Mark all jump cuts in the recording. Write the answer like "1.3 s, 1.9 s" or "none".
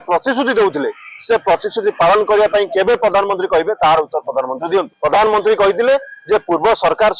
4.9 s